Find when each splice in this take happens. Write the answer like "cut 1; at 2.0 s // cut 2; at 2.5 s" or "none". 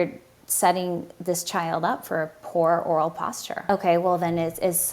cut 1; at 3.7 s